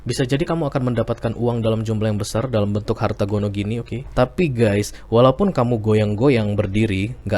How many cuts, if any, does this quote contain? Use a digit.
1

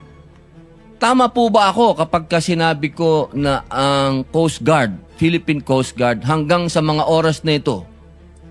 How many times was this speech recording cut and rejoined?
1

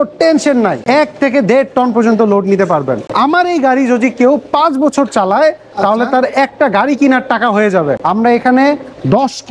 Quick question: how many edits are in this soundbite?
3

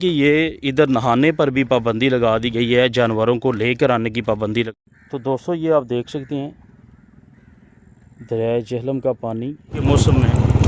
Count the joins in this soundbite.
2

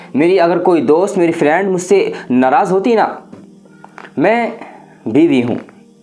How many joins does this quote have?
1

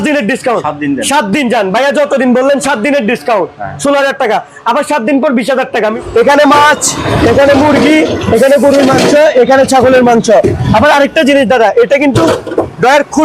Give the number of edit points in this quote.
1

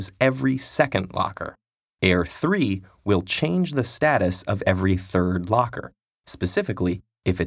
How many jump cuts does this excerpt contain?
1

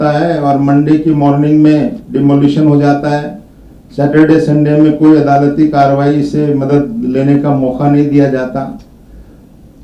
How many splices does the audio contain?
0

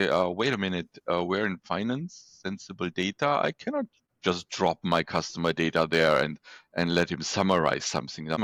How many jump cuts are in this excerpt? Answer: 0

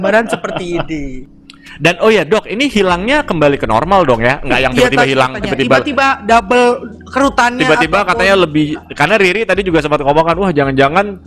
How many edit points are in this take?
1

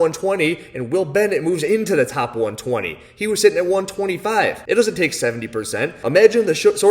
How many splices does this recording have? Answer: 1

